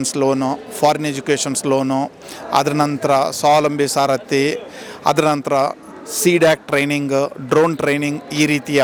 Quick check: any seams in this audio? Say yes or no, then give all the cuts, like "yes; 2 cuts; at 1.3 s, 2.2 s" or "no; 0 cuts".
no; 0 cuts